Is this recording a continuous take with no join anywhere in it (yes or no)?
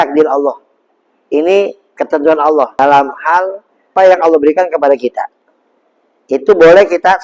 no